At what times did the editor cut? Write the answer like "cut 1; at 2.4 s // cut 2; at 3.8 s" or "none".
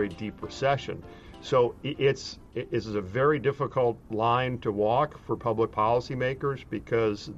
cut 1; at 2.4 s // cut 2; at 4.1 s

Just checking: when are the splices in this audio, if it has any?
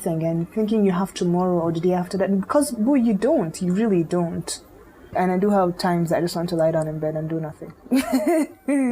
cut 1; at 5.1 s // cut 2; at 7.7 s

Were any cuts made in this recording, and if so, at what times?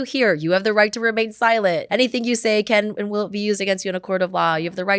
cut 1; at 1.9 s

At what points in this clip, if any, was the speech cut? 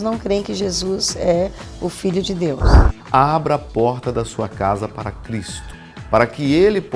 cut 1; at 2.7 s

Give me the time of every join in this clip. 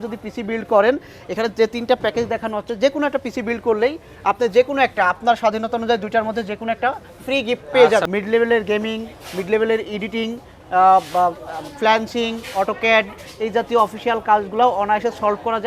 cut 1; at 8.1 s

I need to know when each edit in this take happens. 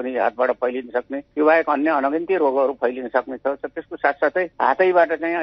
none

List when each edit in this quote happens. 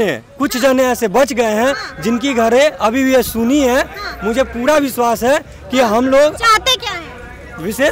none

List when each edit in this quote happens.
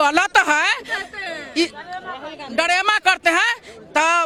none

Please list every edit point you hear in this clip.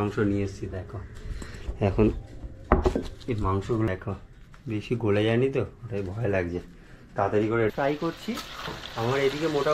cut 1; at 3.9 s // cut 2; at 7.7 s

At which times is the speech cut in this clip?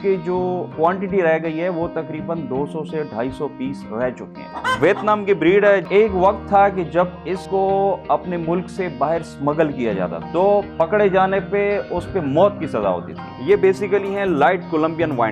cut 1; at 4.4 s // cut 2; at 5.9 s // cut 3; at 13.2 s

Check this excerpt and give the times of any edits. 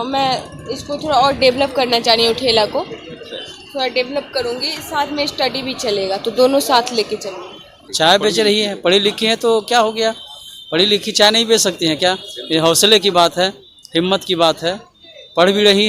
cut 1; at 7.8 s

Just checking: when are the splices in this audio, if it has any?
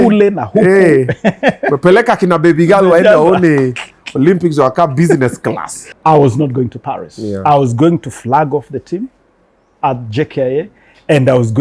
cut 1; at 5.9 s

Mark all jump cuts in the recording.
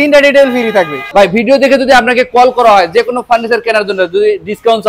cut 1; at 1.0 s

